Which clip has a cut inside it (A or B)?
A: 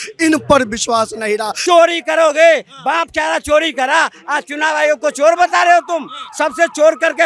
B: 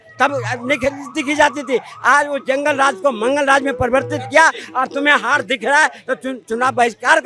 A